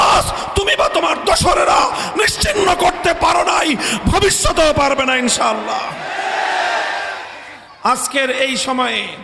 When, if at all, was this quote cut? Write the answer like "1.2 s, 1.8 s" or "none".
none